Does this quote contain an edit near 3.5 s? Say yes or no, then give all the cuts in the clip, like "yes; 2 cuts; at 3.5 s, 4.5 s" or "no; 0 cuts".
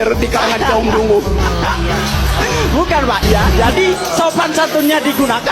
yes; 1 cut; at 3.5 s